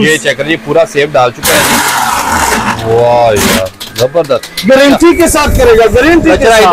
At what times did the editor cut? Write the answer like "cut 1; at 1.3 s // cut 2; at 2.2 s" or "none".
none

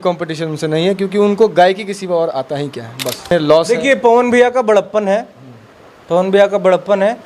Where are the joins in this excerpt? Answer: cut 1; at 3.3 s

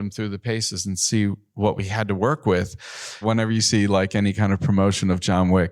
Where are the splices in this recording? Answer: cut 1; at 1.4 s // cut 2; at 3.2 s

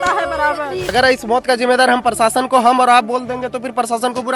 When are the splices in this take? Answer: cut 1; at 0.9 s

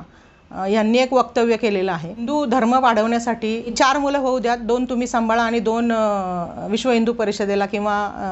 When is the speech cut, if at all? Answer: cut 1; at 2.3 s // cut 2; at 3.7 s

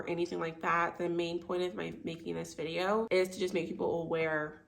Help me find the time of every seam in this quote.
cut 1; at 3.1 s

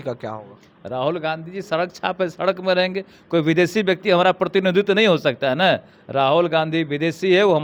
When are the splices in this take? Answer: none

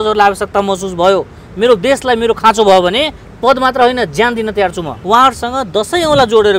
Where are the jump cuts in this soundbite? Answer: cut 1; at 5.0 s

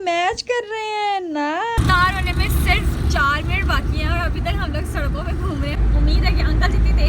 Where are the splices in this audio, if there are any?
cut 1; at 1.8 s // cut 2; at 5.8 s

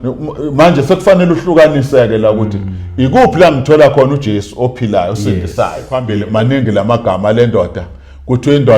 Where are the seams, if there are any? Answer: cut 1; at 6.2 s

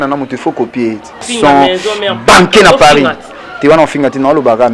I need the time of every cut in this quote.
cut 1; at 1.3 s

